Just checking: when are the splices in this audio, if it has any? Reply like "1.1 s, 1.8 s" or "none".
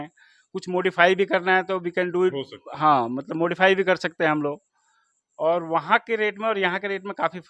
none